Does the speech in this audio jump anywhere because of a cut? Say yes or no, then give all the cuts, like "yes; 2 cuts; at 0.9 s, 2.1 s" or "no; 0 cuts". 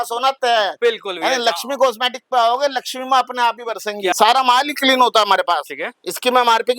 yes; 1 cut; at 4.1 s